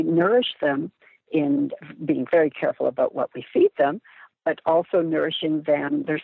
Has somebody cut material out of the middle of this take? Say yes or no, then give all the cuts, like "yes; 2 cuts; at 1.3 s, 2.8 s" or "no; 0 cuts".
no; 0 cuts